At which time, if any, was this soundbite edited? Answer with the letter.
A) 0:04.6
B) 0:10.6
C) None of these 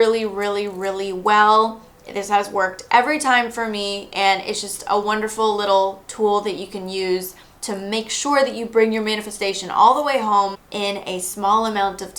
B